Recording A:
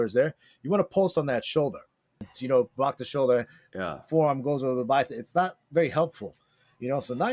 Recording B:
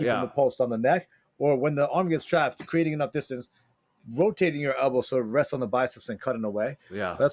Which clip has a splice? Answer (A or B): A